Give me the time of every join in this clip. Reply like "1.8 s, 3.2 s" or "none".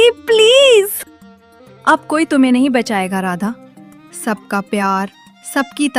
none